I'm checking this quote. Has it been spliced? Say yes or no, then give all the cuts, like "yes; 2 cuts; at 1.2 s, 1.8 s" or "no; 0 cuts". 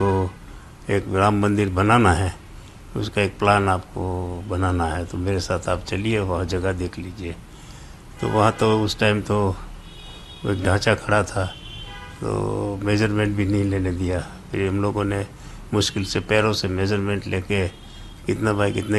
no; 0 cuts